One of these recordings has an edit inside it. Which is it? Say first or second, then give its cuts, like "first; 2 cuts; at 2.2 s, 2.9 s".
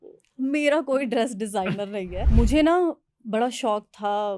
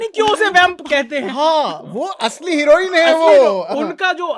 first; 1 cut; at 2.2 s